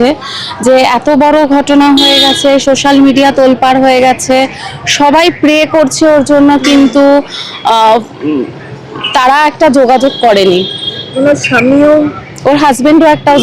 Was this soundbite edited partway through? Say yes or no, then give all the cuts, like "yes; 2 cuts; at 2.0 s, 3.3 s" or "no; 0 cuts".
no; 0 cuts